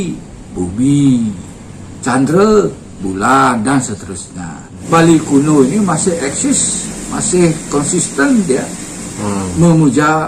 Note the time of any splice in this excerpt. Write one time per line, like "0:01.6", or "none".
0:04.7